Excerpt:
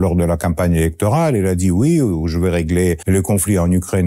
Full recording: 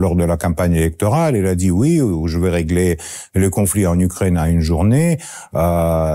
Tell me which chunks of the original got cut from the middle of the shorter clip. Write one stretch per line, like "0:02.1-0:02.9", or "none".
0:03.0-0:03.3